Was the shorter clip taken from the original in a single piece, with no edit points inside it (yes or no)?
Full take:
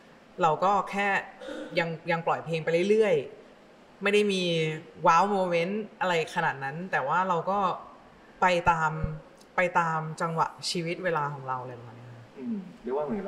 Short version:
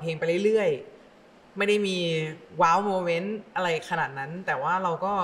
yes